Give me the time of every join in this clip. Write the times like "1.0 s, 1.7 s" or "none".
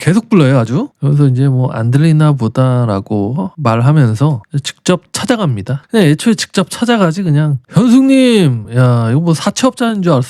none